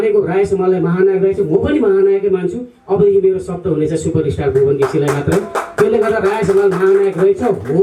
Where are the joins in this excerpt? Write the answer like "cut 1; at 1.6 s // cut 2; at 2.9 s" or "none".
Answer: none